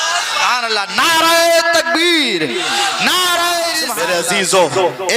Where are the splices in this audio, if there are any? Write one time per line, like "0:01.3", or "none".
0:03.8